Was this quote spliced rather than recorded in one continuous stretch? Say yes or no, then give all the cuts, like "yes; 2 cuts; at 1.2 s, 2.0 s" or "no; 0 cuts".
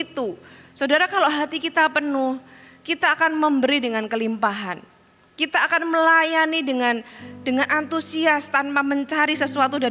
no; 0 cuts